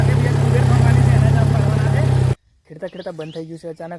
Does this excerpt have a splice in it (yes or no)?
yes